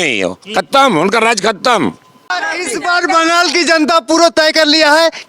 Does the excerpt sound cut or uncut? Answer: cut